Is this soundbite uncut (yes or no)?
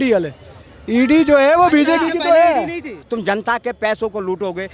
no